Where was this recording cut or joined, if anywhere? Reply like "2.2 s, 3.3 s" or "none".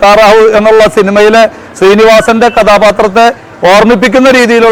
none

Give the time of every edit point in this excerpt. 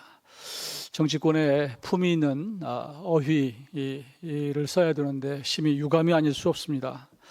none

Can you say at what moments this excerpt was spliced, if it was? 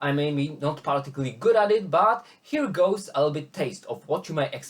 none

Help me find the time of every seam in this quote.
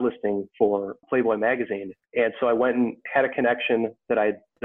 1.9 s, 3.0 s

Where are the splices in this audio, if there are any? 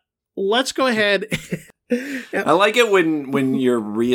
1.5 s

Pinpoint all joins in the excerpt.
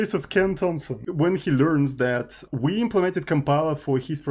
0.9 s, 2.5 s

